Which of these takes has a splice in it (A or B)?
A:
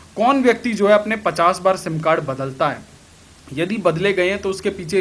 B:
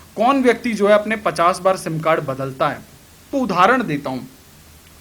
B